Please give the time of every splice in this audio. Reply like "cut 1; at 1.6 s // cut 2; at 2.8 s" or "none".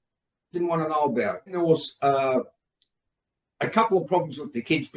cut 1; at 1.6 s